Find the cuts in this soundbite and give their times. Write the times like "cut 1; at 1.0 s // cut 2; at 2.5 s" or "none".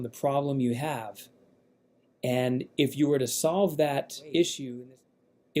cut 1; at 4.7 s